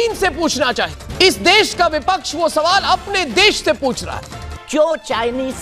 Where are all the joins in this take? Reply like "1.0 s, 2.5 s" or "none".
1.0 s, 4.5 s